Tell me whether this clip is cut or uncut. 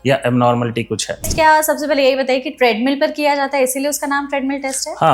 cut